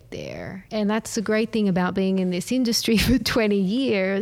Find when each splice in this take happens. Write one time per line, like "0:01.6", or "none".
none